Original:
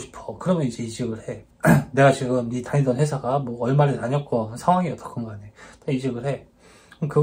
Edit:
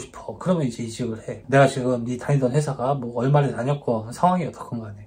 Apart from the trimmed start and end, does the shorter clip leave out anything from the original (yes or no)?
yes